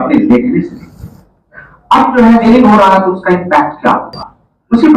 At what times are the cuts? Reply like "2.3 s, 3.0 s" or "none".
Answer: 2.4 s